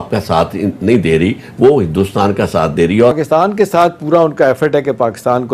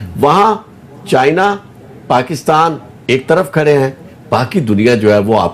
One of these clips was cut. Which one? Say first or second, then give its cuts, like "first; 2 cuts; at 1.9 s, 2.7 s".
first; 1 cut; at 3.2 s